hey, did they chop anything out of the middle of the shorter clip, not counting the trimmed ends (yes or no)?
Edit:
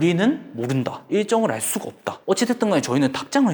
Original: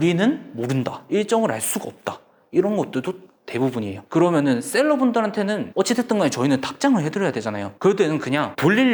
yes